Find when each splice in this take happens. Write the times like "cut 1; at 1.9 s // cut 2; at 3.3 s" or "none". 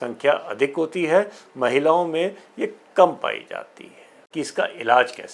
cut 1; at 4.2 s